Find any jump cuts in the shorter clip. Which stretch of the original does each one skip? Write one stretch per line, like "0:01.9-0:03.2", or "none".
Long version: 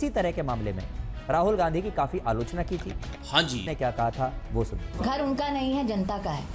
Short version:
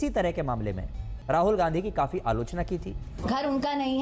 0:03.1-0:04.8